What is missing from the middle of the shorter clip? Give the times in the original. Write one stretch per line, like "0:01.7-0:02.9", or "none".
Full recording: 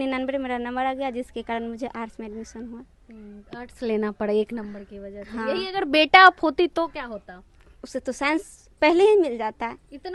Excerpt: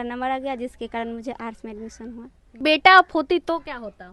0:03.2-0:05.9